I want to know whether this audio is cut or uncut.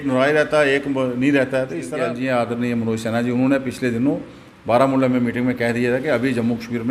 cut